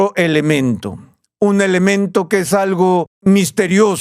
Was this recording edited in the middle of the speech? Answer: yes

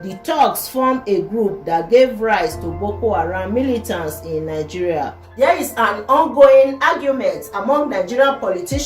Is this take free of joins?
no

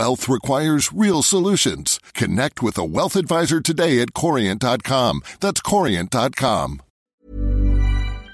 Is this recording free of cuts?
no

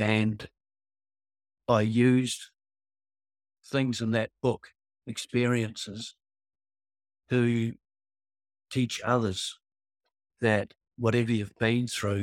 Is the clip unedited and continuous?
yes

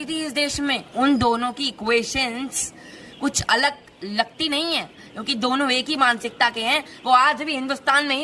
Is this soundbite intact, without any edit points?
yes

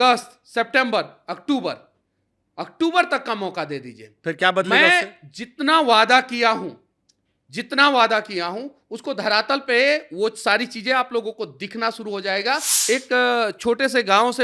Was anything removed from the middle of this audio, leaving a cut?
yes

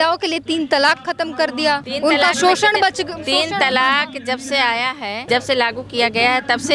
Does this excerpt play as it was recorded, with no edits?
no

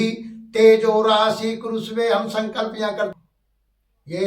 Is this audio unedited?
no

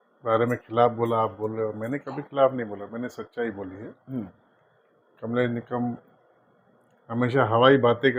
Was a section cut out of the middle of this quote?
no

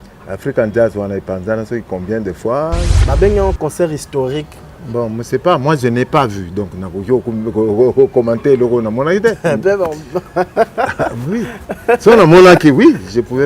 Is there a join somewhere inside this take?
yes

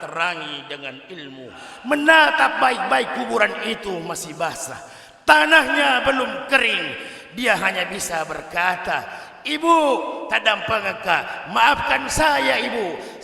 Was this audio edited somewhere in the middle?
yes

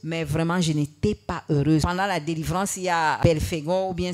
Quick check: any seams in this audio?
yes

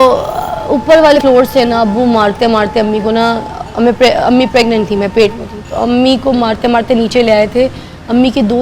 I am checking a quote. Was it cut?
yes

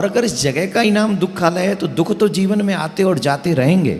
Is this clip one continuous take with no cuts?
yes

